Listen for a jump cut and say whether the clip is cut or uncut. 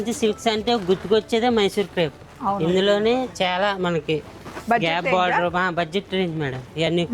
uncut